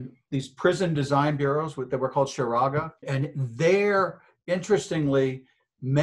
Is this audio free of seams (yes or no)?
no